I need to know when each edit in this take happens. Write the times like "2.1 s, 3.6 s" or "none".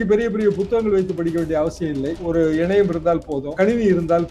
2.2 s, 3.5 s

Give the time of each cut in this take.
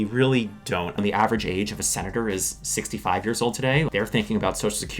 0.9 s, 3.9 s

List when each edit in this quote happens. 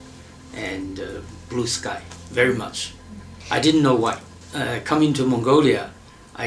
4.3 s

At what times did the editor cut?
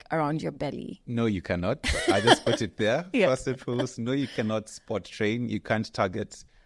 0.9 s

